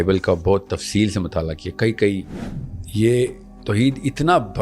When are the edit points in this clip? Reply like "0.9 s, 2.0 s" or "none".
2.4 s